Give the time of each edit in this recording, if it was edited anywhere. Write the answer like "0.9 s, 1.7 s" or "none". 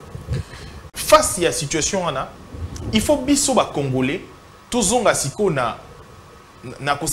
0.9 s